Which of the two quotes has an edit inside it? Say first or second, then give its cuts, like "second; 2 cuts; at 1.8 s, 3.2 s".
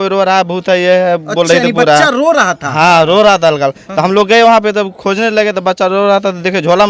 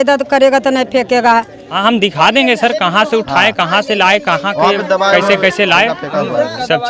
second; 1 cut; at 1.6 s